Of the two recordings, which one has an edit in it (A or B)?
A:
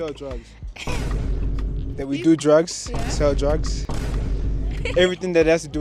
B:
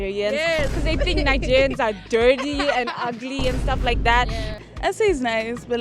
B